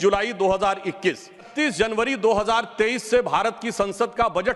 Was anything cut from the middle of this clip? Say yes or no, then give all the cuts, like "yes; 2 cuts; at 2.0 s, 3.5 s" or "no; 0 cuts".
yes; 1 cut; at 1.5 s